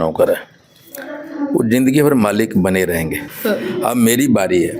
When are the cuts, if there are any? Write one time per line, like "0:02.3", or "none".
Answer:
0:03.3